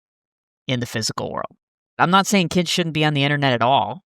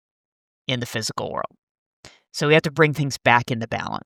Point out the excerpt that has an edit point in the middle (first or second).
first